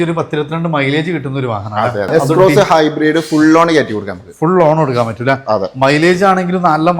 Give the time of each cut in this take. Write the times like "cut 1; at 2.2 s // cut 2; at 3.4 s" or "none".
cut 1; at 2.1 s

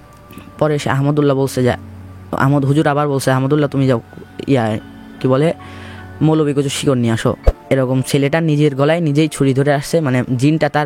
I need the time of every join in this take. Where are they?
cut 1; at 7.5 s

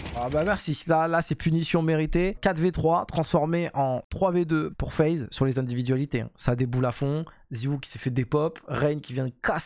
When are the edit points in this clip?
none

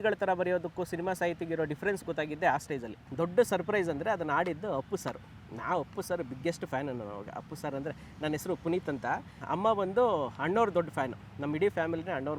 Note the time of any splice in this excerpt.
cut 1; at 3.1 s // cut 2; at 9.4 s

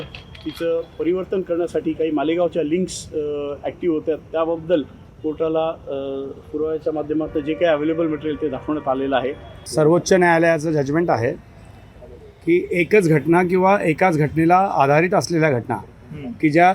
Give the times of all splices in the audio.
cut 1; at 9.6 s

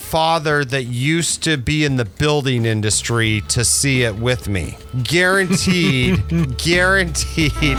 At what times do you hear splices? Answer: none

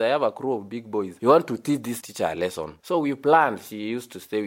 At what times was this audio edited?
cut 1; at 1.1 s // cut 2; at 2.0 s

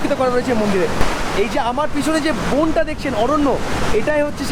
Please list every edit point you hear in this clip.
cut 1; at 1.0 s

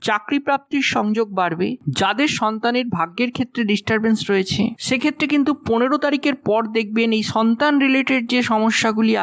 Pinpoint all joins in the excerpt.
cut 1; at 1.8 s

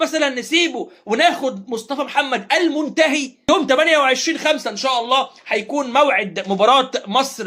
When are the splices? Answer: none

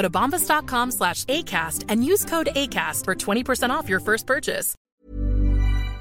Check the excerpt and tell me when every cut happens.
cut 1; at 4.7 s

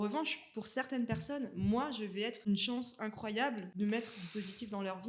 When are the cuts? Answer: cut 1; at 2.5 s // cut 2; at 3.7 s

